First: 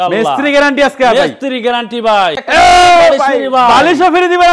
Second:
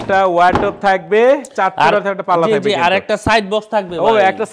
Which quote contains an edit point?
first; 1 cut; at 2.4 s

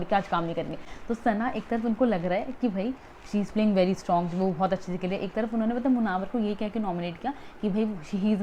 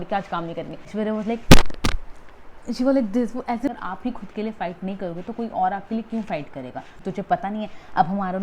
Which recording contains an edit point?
second; 3 cuts; at 0.9 s, 3.7 s, 6.9 s

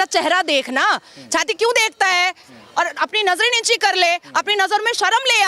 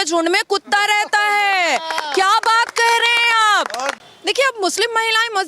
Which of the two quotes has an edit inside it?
second; 1 cut; at 4.0 s

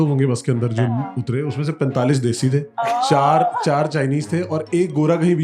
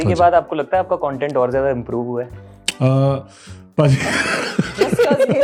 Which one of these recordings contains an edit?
first; 1 cut; at 2.7 s

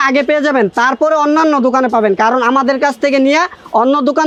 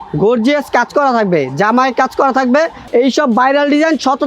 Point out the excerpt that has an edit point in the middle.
second; 1 cut; at 2.8 s

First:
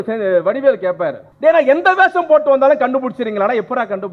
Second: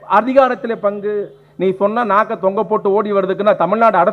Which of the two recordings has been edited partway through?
first; 1 cut; at 1.3 s

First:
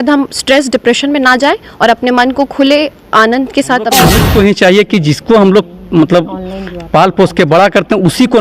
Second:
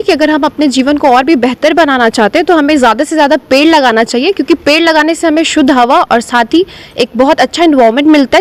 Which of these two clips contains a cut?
first; 1 cut; at 4.0 s

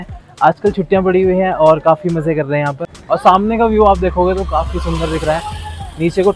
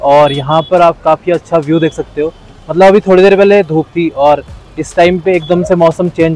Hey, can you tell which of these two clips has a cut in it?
first; 1 cut; at 2.9 s

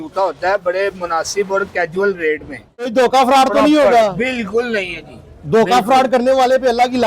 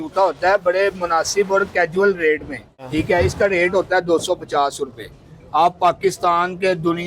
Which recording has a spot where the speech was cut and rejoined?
first; 1 cut; at 2.7 s

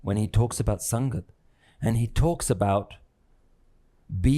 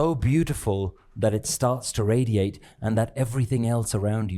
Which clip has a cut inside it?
second; 1 cut; at 1.9 s

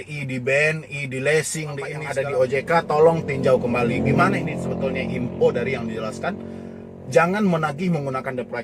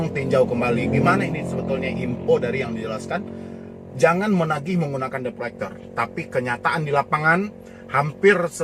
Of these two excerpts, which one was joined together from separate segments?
first; 1 cut; at 2.0 s

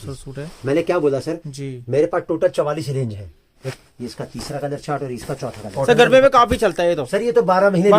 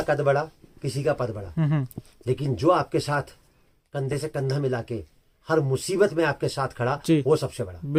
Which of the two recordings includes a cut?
first; 2 cuts; at 3.6 s, 5.7 s

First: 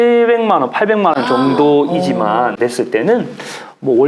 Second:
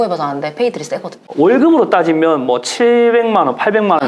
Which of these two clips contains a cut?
first; 1 cut; at 2.6 s

